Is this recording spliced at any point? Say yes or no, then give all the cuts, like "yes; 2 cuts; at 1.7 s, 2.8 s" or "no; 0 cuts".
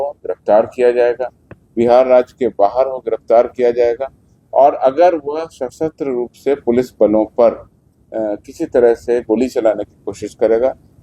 no; 0 cuts